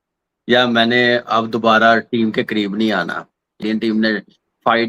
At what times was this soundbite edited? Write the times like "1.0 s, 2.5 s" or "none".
3.6 s